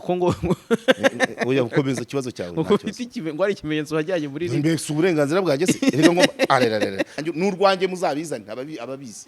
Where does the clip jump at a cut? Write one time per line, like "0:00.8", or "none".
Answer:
0:07.1